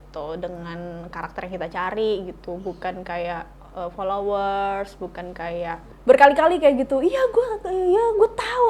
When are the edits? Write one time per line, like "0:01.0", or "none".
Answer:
0:05.9